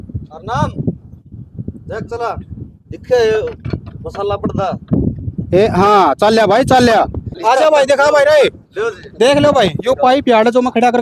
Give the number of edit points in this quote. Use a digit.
1